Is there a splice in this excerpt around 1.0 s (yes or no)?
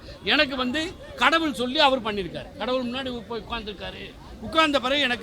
no